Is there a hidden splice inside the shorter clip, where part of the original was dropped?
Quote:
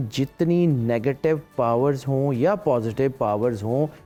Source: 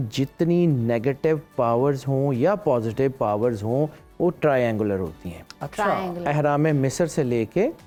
no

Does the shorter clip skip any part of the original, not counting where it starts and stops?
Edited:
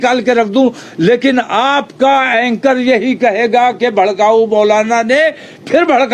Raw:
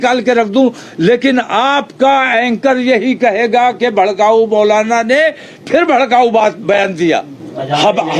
no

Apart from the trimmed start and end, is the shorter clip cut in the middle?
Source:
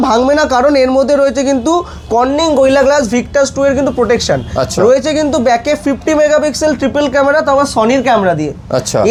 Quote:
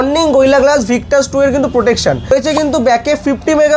yes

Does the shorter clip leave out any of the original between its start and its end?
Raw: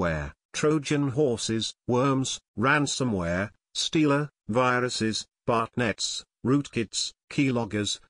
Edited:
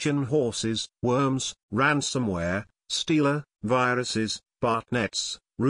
no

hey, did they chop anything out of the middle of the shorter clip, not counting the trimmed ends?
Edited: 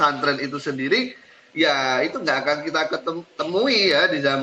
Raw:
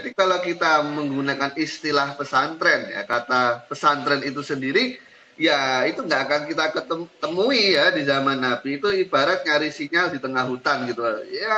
no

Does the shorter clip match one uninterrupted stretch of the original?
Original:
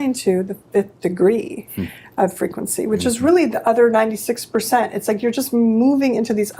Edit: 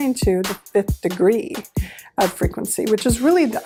yes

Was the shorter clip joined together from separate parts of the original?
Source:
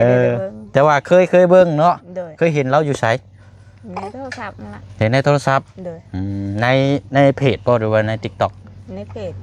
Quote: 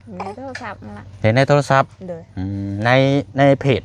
no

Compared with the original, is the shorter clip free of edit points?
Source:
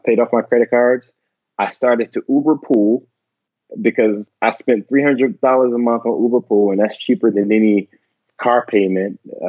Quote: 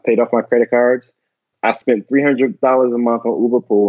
no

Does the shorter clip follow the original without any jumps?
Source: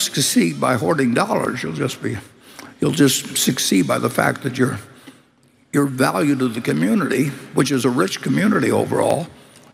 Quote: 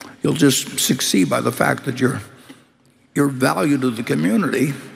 yes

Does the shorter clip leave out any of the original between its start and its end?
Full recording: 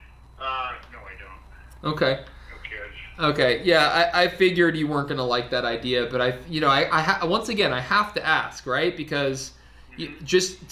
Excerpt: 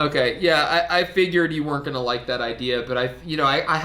no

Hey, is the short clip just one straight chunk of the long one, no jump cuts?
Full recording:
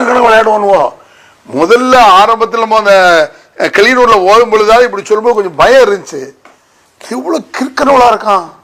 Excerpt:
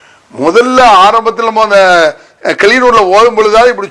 yes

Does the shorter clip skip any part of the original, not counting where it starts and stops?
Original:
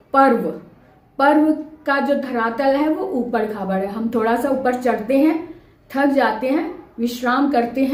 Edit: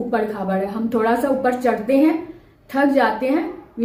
no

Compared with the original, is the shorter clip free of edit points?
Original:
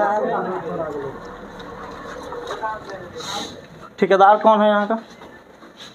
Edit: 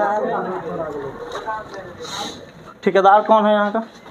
no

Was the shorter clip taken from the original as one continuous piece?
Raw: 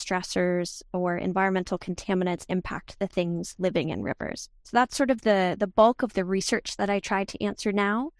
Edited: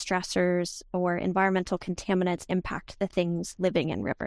yes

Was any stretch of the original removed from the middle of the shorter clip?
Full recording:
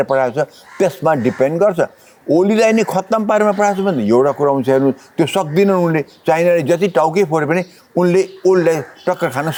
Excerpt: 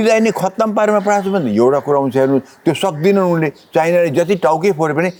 no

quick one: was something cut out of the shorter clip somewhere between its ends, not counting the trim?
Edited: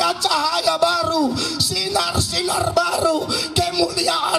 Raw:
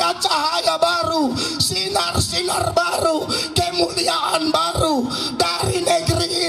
no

